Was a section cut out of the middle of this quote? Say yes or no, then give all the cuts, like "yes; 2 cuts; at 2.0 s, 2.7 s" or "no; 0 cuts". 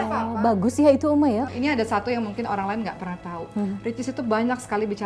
yes; 1 cut; at 1.5 s